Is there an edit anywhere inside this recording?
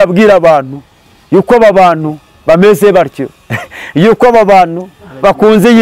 no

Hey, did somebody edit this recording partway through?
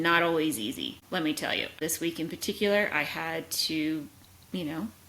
yes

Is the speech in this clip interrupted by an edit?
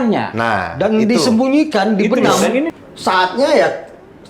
yes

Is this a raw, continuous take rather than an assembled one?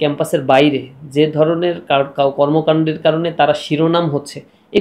yes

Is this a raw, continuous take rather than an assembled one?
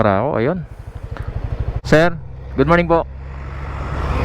no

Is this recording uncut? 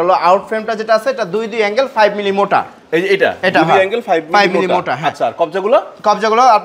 yes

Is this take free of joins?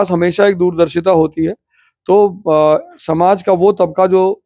yes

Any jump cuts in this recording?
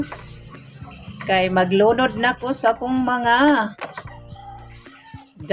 no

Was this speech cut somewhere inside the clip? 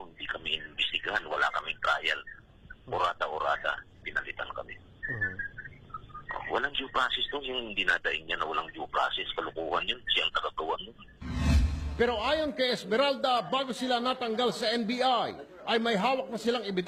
no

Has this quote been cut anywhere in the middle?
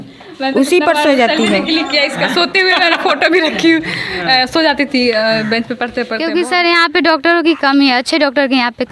yes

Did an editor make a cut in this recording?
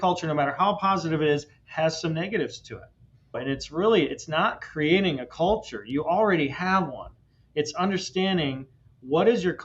yes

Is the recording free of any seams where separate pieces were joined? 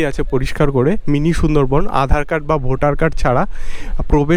yes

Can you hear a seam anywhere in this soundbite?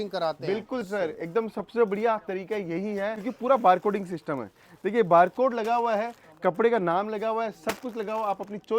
yes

